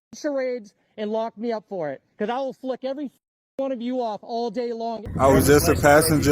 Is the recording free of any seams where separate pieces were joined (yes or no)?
no